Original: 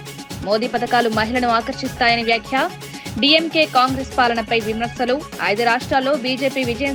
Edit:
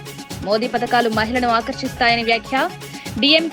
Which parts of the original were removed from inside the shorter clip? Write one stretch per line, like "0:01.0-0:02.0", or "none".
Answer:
none